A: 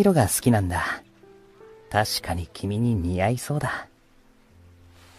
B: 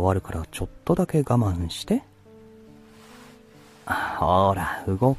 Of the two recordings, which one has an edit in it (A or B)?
B